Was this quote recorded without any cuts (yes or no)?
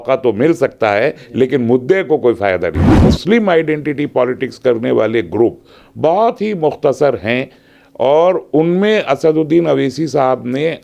no